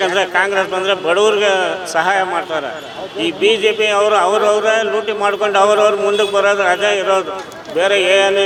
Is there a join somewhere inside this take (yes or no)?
no